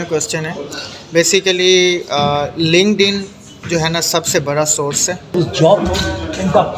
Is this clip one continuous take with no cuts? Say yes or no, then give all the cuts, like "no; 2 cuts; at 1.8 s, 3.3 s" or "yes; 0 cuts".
no; 1 cut; at 5.3 s